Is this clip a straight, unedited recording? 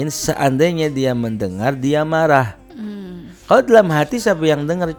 yes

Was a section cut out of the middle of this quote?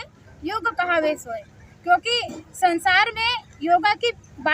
no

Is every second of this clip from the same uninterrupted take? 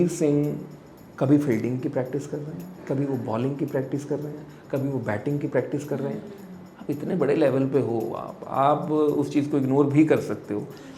yes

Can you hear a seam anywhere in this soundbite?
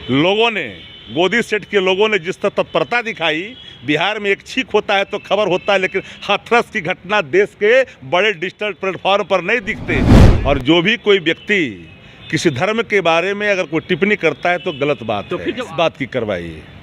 yes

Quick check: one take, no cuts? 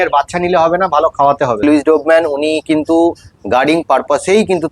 no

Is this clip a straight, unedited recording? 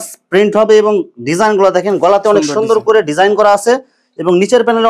yes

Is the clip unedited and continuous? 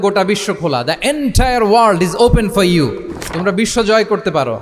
yes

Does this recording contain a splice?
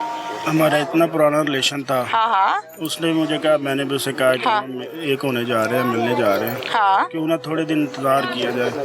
no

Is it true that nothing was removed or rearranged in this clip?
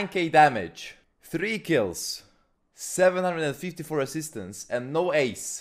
yes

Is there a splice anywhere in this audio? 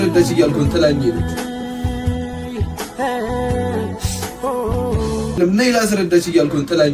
no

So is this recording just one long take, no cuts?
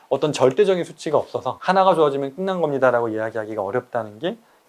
yes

